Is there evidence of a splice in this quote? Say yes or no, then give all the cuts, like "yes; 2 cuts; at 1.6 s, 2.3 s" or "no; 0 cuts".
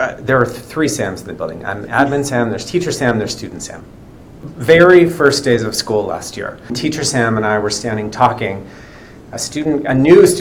yes; 2 cuts; at 4.5 s, 6.8 s